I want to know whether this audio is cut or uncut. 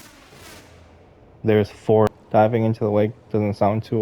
cut